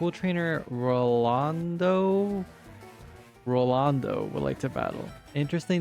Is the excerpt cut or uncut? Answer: uncut